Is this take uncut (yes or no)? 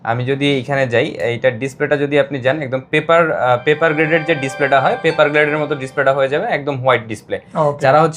yes